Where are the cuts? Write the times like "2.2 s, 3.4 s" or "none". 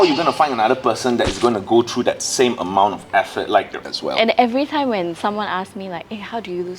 3.8 s